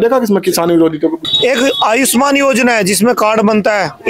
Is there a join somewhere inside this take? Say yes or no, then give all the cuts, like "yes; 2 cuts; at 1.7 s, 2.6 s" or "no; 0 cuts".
yes; 1 cut; at 1.2 s